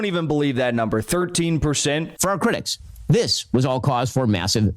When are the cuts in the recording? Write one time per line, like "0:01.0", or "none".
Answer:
0:02.1